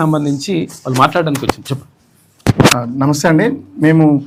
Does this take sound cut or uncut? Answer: uncut